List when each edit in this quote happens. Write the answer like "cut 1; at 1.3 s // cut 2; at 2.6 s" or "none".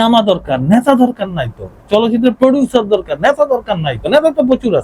cut 1; at 3.9 s